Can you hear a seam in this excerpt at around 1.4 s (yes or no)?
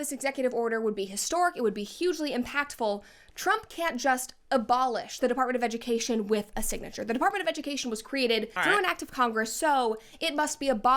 no